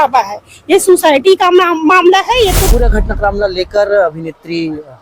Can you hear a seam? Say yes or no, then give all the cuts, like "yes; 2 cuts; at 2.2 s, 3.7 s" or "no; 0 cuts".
yes; 1 cut; at 2.7 s